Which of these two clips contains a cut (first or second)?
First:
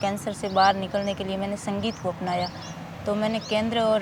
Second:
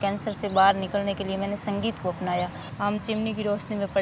second